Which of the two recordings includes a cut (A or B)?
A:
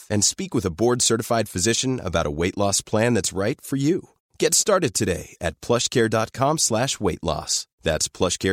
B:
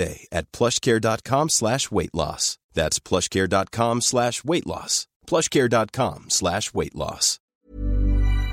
B